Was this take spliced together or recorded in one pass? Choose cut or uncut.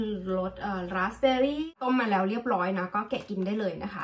cut